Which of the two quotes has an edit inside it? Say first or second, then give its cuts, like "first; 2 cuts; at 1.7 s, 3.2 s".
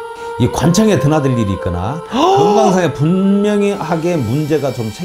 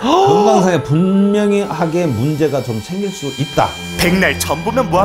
second; 1 cut; at 4.0 s